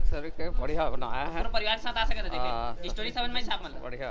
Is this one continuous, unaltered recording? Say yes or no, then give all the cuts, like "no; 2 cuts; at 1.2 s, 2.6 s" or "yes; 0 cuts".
yes; 0 cuts